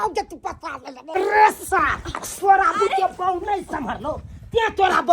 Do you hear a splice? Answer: yes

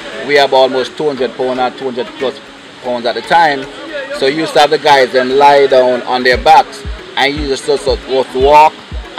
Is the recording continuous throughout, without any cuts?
yes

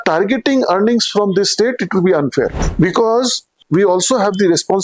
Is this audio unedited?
no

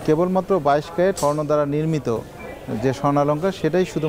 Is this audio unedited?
no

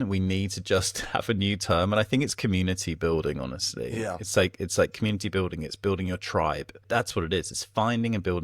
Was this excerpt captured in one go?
no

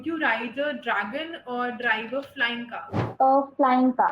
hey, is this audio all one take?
no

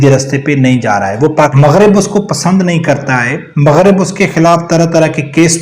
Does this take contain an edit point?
yes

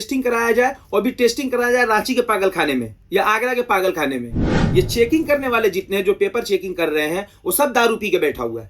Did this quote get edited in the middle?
yes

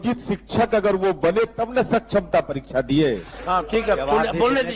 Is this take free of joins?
no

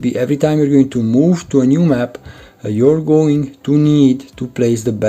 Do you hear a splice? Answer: no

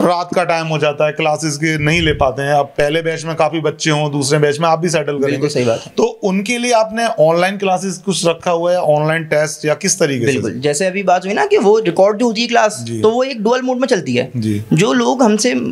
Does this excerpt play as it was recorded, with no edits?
yes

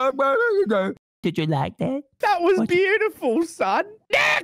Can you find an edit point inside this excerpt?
yes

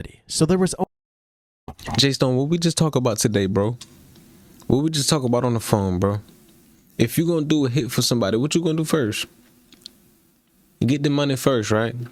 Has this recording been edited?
no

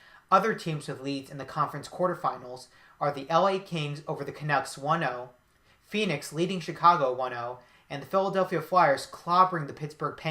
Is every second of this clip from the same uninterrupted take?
no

